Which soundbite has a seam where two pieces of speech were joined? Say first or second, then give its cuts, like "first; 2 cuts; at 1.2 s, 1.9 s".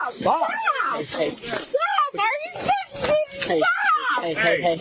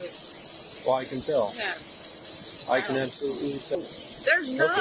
second; 1 cut; at 3.8 s